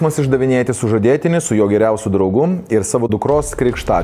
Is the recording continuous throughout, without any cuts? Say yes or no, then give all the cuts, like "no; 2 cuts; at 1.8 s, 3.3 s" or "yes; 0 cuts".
no; 1 cut; at 3.1 s